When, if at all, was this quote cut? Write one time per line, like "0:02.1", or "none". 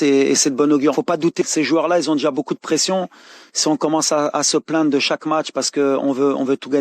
0:00.9